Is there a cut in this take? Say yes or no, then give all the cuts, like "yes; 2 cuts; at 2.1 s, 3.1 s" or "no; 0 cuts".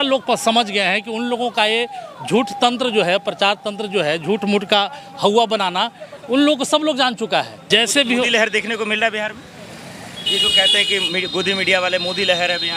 yes; 1 cut; at 7.6 s